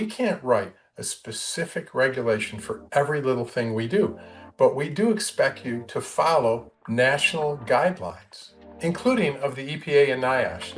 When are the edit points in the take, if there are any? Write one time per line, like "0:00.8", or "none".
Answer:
none